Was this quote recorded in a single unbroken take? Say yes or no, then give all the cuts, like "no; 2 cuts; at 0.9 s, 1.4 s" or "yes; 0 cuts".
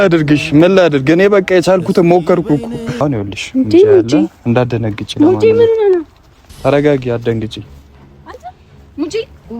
no; 1 cut; at 3.0 s